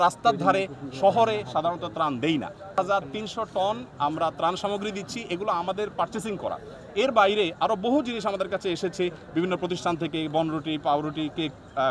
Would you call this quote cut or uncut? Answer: cut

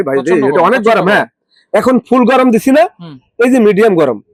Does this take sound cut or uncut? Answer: uncut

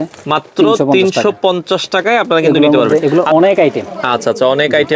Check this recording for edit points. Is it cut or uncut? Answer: cut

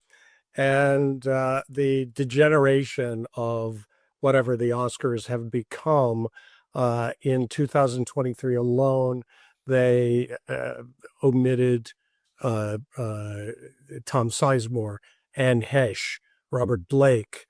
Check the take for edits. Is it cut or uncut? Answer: uncut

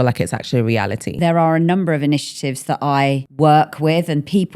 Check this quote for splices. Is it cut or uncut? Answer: cut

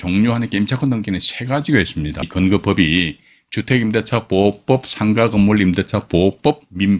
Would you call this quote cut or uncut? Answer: cut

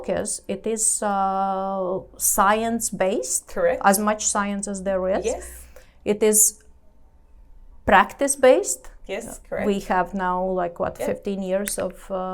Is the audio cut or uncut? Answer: uncut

